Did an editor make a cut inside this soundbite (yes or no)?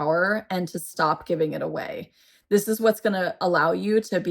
yes